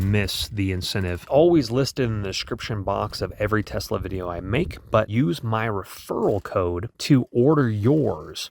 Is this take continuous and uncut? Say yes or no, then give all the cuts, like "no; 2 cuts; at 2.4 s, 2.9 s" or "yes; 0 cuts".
no; 2 cuts; at 1.2 s, 5.1 s